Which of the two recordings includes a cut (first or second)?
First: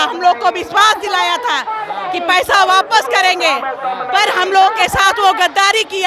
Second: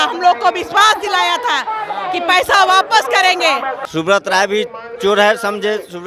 second